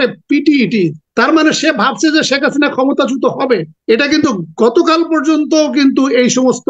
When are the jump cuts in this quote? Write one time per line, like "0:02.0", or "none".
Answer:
0:01.0
0:03.7